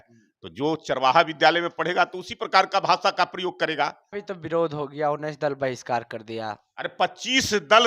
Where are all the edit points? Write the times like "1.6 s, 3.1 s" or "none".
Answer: 4.2 s

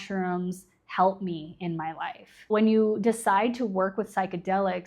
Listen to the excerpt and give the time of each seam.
2.5 s

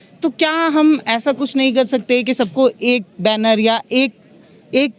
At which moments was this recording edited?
none

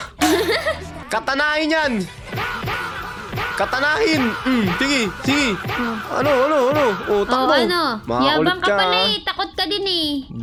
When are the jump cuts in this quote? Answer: none

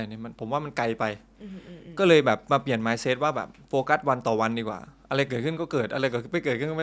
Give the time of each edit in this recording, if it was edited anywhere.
none

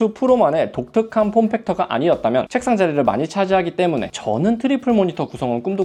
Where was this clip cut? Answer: none

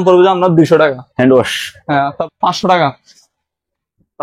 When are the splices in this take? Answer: 2.2 s

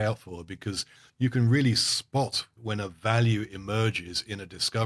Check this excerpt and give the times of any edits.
1.0 s, 2.6 s

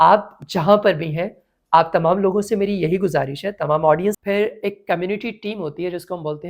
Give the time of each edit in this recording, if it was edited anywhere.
4.2 s

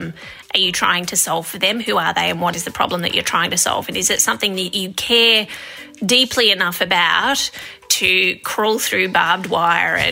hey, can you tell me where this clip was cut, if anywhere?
2.5 s

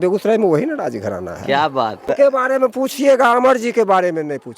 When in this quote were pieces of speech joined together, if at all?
2.1 s

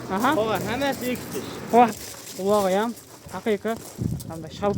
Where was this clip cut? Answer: 1.9 s

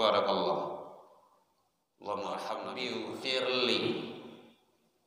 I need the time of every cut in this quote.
2.8 s

